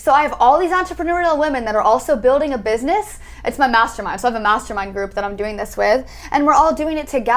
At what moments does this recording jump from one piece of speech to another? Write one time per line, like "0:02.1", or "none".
none